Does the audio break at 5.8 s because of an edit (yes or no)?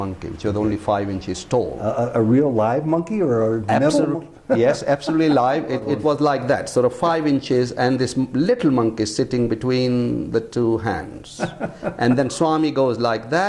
yes